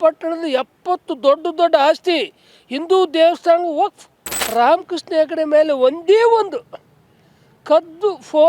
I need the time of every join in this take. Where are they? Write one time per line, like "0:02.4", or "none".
0:04.3